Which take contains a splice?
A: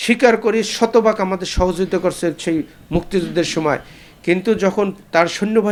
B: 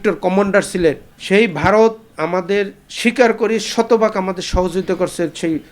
B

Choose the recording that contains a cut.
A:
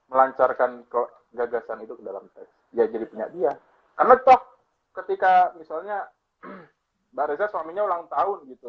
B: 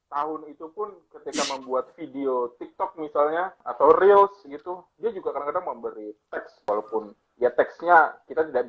B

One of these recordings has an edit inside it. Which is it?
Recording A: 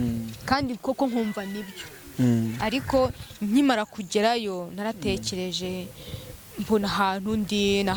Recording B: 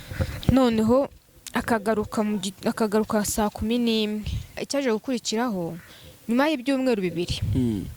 B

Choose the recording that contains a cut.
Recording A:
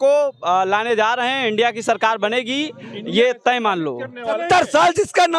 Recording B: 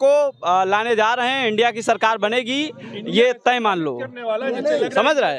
A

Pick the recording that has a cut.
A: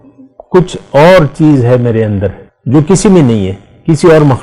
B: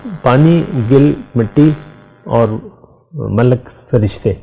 A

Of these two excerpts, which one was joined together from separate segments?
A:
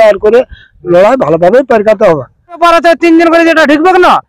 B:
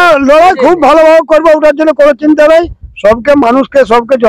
A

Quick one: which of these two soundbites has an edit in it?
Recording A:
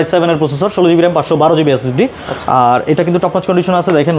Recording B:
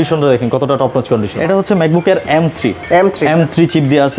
B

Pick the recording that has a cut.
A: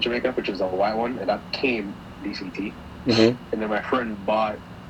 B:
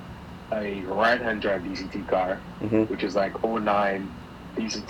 A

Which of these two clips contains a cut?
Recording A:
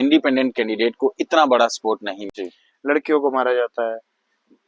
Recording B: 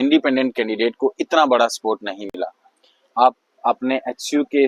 A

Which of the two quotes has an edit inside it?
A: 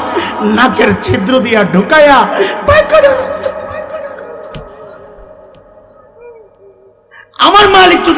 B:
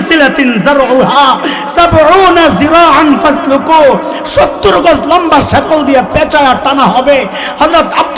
A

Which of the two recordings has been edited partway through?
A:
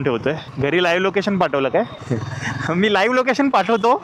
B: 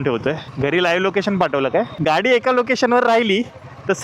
B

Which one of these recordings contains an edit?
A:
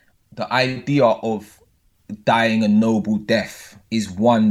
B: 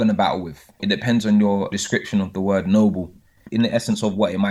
B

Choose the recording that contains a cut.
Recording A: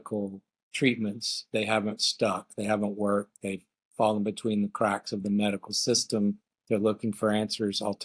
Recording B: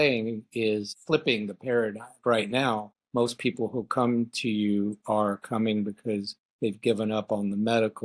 B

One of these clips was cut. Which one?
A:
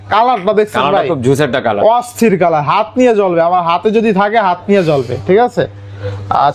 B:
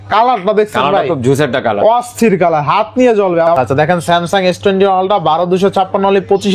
B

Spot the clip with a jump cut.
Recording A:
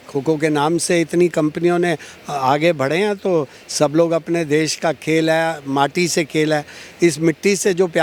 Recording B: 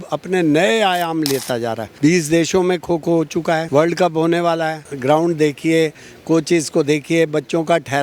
B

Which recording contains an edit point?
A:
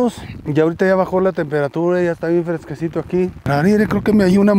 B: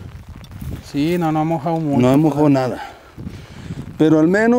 A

